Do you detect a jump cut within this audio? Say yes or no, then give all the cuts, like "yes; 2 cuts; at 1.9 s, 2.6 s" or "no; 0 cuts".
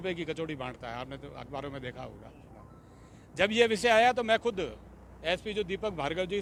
no; 0 cuts